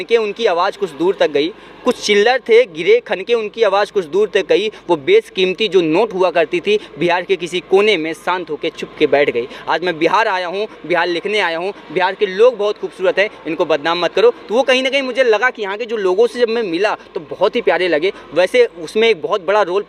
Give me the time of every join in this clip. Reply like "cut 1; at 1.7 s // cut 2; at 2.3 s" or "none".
none